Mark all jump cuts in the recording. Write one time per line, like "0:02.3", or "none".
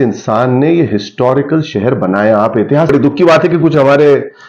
0:02.9